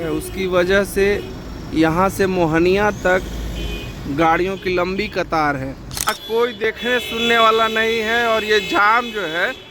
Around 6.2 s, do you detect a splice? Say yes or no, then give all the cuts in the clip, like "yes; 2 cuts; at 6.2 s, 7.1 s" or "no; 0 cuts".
yes; 1 cut; at 6.2 s